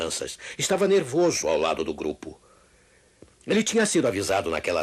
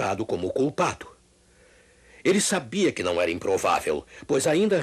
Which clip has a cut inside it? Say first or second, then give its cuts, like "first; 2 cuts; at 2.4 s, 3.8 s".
first; 1 cut; at 3.1 s